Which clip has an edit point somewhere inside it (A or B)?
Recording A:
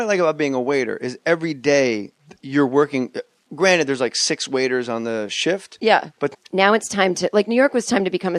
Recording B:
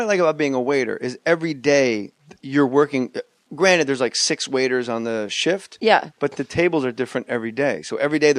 B